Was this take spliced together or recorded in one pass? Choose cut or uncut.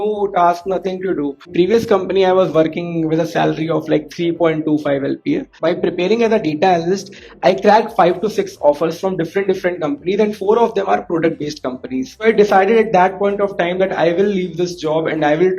cut